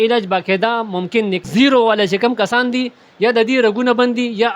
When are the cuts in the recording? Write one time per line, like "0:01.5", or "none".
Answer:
0:01.4